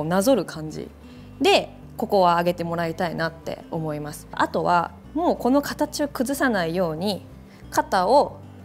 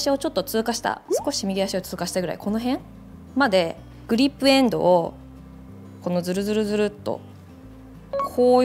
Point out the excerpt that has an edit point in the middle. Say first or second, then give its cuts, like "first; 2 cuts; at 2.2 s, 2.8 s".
first; 1 cut; at 4.4 s